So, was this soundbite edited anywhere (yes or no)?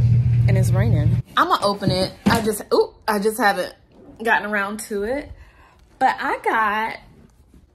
yes